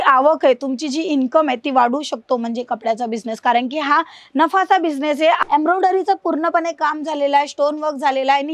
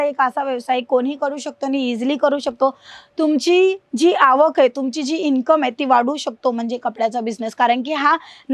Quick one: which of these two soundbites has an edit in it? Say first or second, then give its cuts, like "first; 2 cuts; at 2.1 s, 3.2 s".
first; 1 cut; at 5.4 s